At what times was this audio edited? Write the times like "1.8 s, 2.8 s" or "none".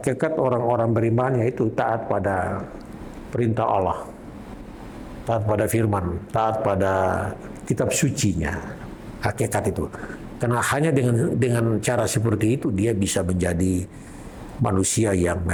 none

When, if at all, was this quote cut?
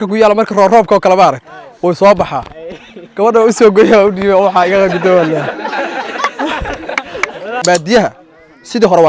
7.6 s

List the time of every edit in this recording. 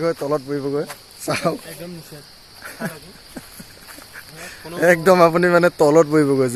none

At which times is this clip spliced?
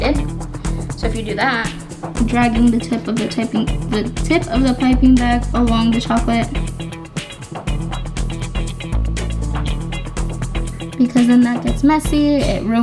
2.1 s

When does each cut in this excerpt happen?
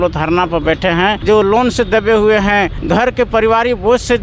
1.2 s, 2.8 s

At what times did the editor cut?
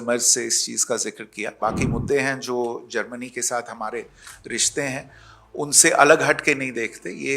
1.5 s

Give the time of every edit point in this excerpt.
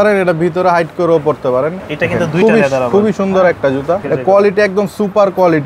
1.8 s, 4.0 s

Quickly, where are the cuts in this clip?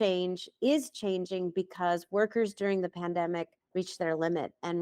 3.6 s

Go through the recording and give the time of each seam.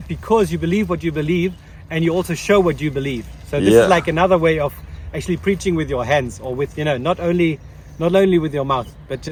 none

